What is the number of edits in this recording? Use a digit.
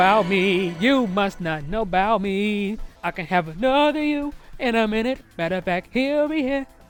0